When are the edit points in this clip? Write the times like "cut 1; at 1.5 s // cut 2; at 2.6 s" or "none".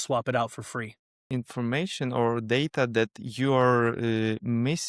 cut 1; at 1.1 s